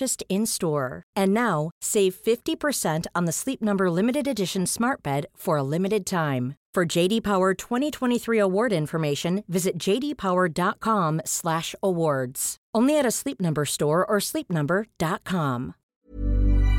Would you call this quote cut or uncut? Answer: cut